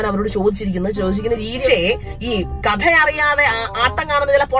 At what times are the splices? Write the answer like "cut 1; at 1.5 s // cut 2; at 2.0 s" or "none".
cut 1; at 1.5 s